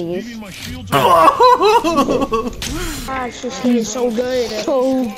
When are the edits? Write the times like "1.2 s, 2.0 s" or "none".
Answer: 3.0 s